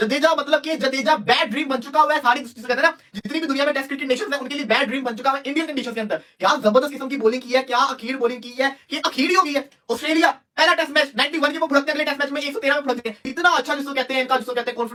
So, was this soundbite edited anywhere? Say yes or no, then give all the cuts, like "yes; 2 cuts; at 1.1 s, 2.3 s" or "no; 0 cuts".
no; 0 cuts